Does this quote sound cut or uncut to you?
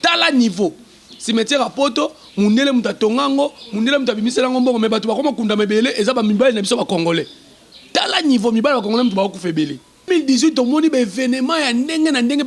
cut